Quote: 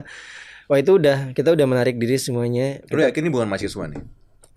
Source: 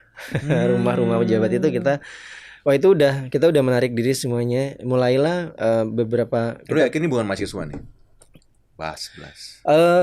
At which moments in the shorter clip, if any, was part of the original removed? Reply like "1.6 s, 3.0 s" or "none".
2.8 s